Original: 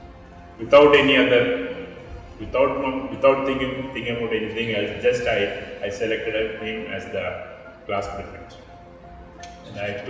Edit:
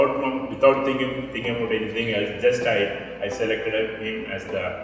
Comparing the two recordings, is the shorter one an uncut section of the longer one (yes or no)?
yes